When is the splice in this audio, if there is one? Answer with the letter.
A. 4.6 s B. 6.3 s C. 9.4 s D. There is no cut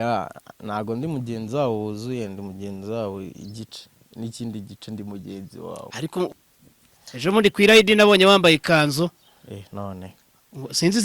B